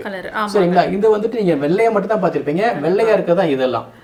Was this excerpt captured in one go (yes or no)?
yes